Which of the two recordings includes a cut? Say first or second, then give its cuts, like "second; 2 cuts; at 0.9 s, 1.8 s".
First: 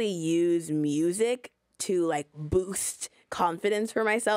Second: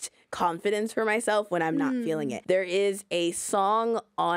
second; 1 cut; at 2.4 s